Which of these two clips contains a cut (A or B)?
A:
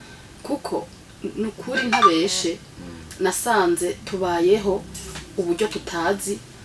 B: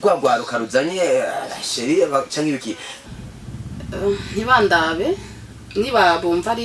B